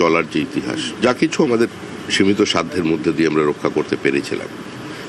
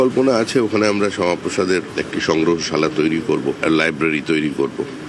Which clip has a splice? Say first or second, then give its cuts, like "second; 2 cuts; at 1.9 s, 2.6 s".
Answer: second; 1 cut; at 2.0 s